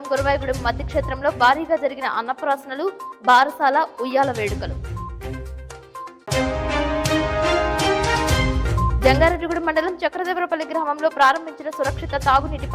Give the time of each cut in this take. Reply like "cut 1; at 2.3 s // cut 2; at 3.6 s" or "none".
none